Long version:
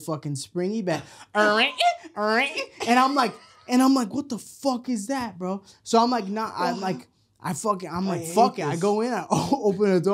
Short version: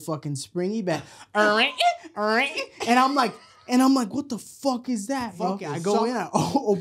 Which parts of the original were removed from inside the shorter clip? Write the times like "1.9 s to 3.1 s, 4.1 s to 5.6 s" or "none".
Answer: 5.7 s to 8.6 s